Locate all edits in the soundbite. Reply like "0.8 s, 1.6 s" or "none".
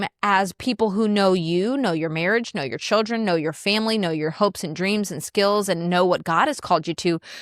none